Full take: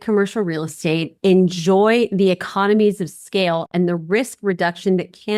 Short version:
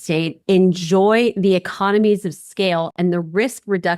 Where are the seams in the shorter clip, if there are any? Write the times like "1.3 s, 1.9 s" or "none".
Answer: none